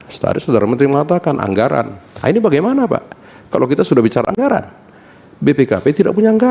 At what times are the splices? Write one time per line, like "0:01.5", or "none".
none